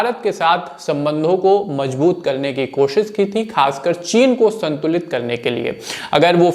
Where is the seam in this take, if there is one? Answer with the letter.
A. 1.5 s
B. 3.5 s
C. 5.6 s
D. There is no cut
D